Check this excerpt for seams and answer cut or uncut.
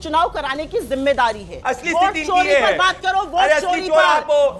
cut